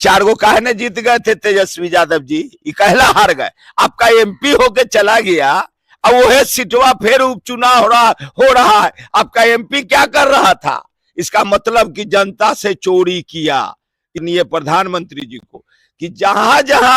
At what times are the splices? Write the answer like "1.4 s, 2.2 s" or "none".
14.2 s